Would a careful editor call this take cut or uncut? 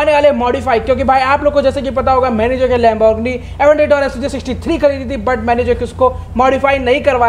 uncut